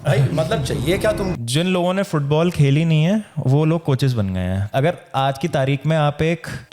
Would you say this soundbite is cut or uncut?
cut